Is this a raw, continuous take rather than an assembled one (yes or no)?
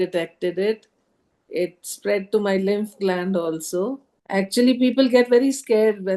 no